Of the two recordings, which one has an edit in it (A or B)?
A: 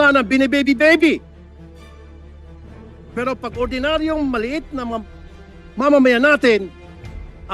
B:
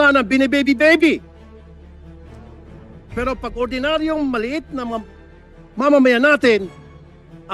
B